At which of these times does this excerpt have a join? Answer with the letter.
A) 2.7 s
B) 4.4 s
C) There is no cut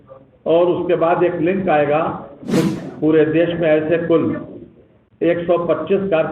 A